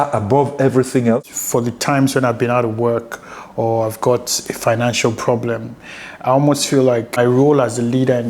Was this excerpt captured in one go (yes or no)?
no